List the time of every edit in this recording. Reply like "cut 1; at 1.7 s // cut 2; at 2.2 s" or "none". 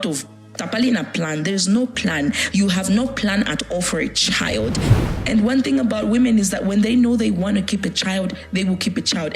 cut 1; at 4.9 s

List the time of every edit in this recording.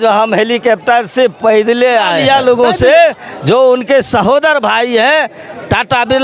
cut 1; at 2.2 s

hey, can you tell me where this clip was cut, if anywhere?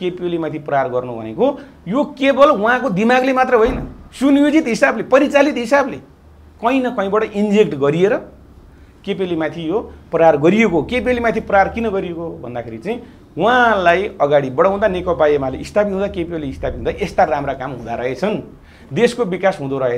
none

